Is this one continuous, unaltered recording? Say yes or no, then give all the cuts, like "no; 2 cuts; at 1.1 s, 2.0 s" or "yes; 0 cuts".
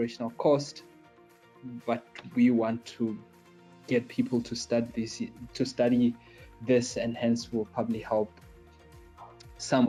yes; 0 cuts